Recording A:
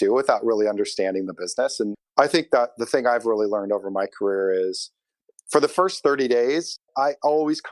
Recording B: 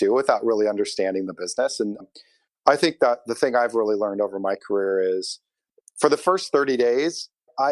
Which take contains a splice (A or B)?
A